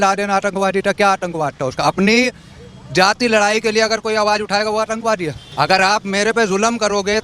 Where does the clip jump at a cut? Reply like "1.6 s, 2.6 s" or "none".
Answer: 5.4 s